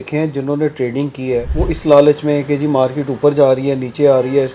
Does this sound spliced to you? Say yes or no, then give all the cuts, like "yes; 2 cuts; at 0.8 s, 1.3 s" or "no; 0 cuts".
yes; 1 cut; at 1.5 s